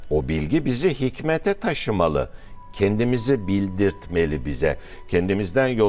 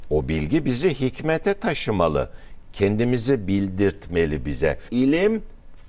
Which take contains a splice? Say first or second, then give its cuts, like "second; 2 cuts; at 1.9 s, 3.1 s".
second; 1 cut; at 4.8 s